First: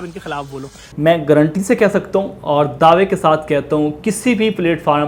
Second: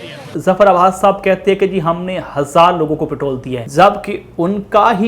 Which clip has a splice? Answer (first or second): second